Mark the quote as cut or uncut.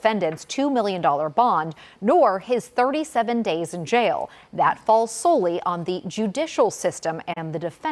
uncut